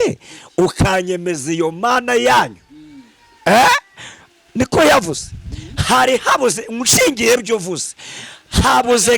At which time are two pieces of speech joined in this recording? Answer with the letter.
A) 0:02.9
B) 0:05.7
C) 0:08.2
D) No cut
D